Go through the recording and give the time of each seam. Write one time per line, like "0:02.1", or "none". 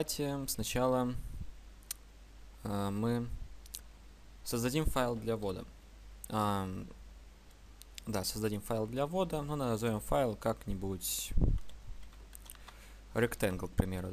0:08.6